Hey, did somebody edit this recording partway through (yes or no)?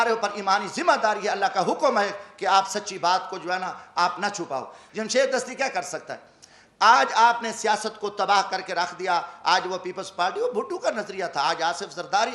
yes